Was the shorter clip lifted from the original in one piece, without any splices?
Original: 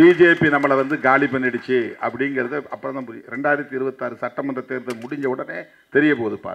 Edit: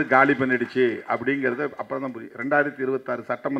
yes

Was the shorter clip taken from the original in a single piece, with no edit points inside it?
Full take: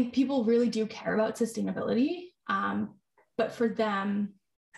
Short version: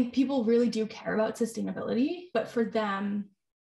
no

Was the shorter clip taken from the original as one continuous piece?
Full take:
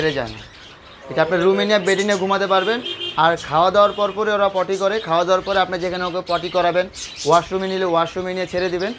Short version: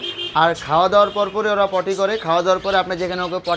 yes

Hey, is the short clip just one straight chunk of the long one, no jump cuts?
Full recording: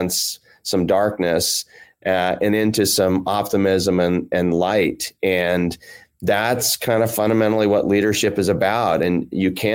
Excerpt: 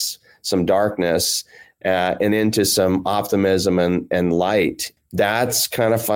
no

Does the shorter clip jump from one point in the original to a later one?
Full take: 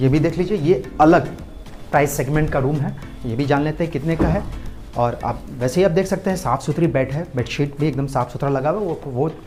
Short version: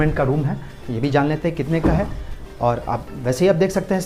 no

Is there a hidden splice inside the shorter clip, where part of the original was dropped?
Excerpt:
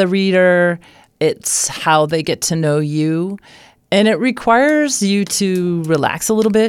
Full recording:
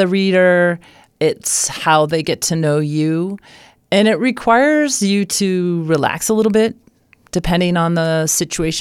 no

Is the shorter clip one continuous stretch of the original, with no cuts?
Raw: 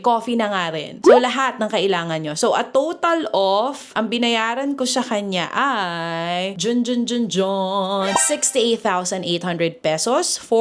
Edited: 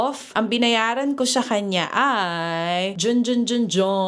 yes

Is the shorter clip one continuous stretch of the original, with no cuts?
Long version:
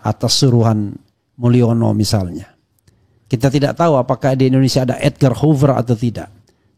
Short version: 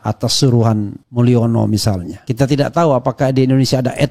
no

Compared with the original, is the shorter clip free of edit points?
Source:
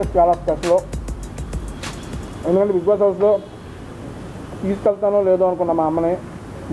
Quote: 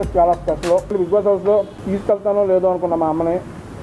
no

